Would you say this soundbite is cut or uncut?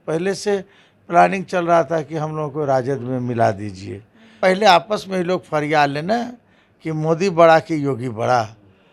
cut